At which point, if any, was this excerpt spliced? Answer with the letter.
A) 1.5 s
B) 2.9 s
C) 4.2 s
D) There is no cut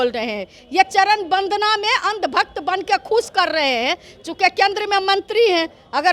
D